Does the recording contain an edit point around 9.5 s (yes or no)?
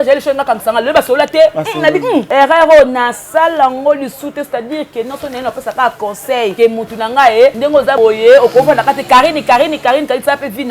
no